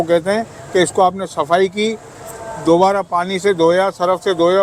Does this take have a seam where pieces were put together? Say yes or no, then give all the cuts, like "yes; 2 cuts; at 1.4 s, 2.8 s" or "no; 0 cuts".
no; 0 cuts